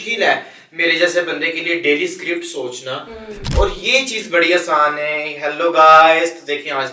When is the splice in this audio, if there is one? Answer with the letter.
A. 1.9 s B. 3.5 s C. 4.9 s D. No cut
B